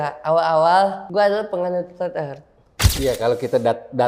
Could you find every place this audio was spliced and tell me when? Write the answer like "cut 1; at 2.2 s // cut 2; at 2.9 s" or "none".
cut 1; at 1.0 s // cut 2; at 2.9 s